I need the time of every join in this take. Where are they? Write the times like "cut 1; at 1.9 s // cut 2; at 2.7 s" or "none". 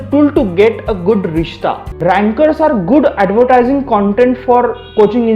cut 1; at 1.9 s